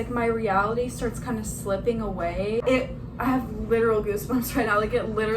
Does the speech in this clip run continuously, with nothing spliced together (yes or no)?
no